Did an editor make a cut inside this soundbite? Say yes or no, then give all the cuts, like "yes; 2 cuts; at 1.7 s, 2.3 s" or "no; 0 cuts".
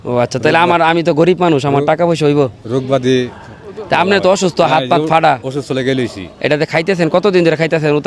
no; 0 cuts